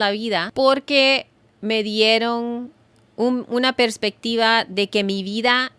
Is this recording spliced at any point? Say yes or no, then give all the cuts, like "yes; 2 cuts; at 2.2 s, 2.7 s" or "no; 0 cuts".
no; 0 cuts